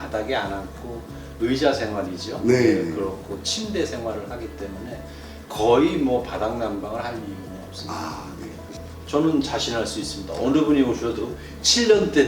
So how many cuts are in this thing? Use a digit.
1